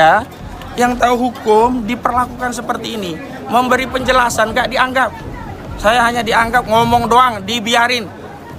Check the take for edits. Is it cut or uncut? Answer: uncut